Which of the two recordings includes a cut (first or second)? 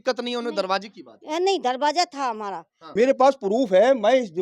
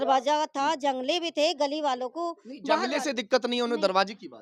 first